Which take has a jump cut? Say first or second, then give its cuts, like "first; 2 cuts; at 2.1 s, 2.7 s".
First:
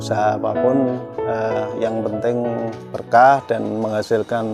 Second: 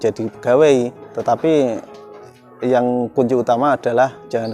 second; 1 cut; at 1.1 s